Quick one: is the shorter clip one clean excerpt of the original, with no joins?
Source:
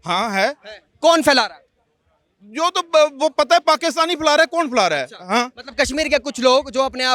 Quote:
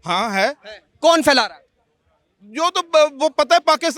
yes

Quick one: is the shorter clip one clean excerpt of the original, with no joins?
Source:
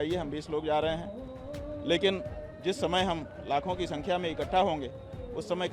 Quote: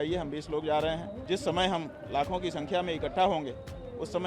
no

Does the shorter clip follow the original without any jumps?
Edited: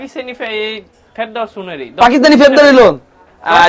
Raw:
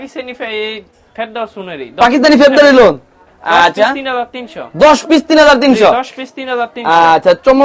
yes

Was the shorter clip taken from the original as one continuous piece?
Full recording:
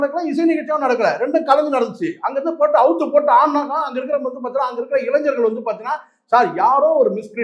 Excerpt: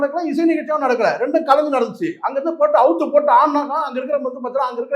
yes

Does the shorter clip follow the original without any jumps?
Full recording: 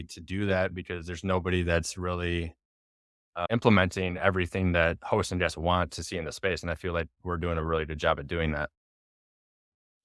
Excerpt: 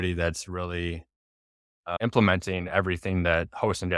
yes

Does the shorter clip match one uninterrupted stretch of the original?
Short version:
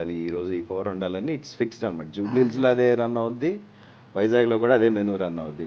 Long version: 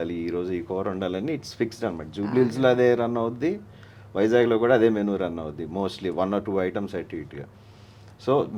yes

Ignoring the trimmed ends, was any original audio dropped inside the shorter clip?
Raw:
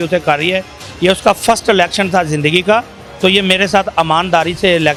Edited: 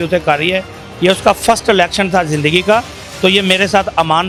no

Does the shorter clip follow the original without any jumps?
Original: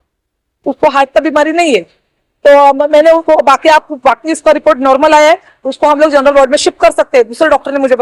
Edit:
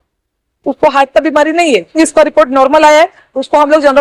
no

